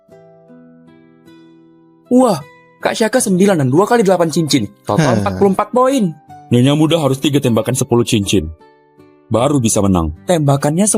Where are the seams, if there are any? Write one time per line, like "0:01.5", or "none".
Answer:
0:02.1

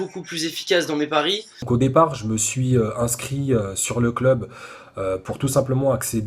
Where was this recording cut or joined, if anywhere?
0:01.7

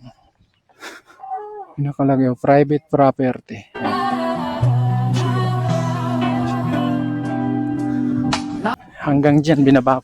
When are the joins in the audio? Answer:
0:03.8
0:08.8

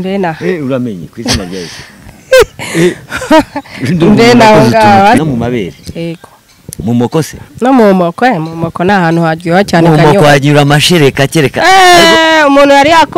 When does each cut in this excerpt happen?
0:05.2

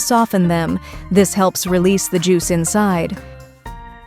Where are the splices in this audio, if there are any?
0:03.2

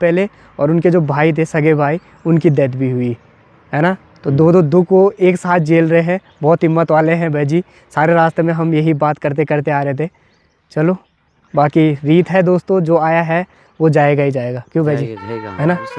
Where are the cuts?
none

